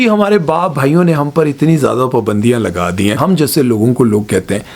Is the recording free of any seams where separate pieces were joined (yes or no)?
no